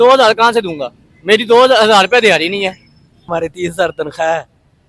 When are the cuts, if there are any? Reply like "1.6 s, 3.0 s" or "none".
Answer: 3.3 s